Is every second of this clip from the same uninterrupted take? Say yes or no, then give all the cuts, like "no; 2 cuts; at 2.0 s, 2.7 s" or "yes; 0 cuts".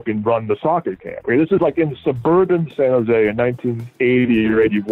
yes; 0 cuts